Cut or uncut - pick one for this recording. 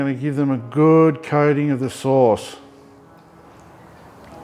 uncut